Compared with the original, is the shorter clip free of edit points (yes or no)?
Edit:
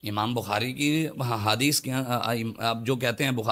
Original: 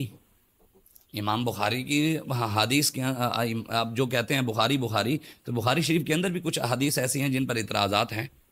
yes